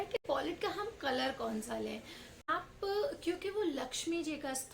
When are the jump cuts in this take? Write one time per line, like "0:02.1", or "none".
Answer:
0:02.3